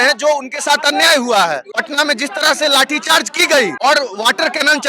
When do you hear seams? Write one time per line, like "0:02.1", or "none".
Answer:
0:01.8
0:03.7